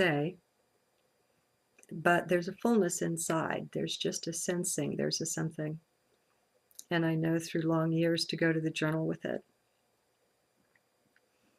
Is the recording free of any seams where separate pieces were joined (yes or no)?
yes